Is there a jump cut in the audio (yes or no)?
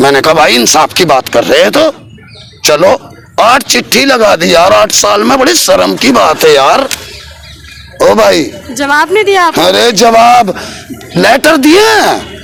no